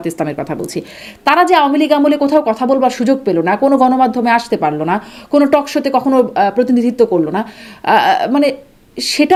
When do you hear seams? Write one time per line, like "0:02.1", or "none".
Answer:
none